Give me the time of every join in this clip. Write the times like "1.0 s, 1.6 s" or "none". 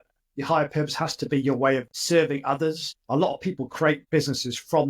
3.0 s, 4.0 s